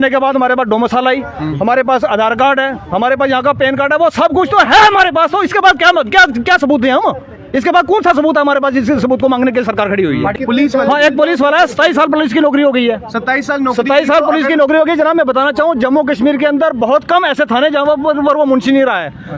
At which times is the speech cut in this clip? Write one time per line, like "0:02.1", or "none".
none